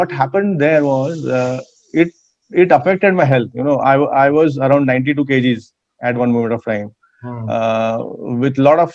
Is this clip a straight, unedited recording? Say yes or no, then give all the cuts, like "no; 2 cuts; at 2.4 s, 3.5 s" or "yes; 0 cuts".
yes; 0 cuts